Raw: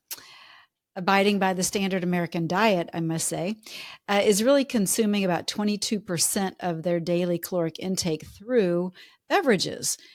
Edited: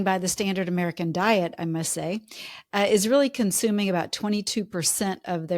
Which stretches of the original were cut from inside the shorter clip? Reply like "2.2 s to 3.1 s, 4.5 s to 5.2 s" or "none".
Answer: none